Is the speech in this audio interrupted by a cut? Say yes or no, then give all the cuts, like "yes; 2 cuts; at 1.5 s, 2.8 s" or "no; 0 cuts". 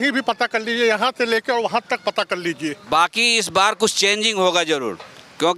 yes; 1 cut; at 2.8 s